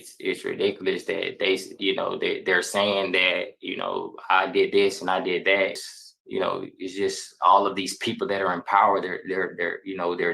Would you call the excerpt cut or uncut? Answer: cut